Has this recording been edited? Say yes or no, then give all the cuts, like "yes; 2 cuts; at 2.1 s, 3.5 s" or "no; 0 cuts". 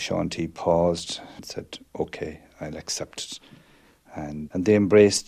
yes; 2 cuts; at 1.4 s, 4.5 s